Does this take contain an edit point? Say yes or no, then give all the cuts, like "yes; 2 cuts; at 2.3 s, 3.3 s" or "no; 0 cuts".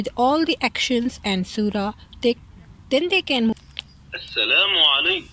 yes; 1 cut; at 3.5 s